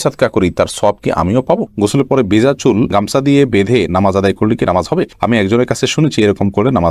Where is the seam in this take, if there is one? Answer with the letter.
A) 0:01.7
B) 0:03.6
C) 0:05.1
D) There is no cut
A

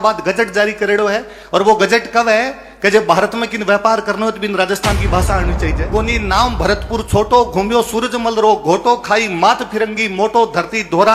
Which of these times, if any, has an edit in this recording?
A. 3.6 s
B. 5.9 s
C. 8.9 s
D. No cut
B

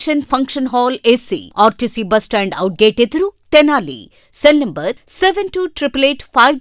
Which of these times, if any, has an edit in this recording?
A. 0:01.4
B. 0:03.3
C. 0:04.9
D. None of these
D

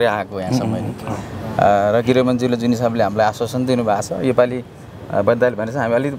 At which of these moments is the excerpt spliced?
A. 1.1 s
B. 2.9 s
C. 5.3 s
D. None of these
D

